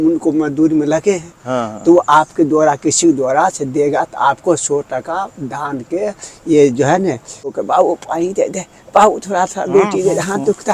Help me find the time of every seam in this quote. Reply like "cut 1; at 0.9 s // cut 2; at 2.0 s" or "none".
cut 1; at 7.6 s